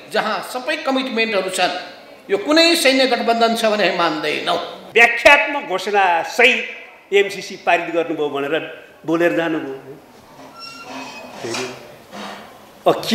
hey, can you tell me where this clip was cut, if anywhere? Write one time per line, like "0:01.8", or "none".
0:04.8